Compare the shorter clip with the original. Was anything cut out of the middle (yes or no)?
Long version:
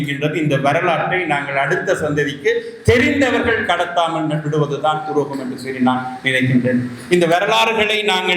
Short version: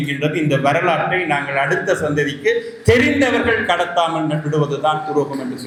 no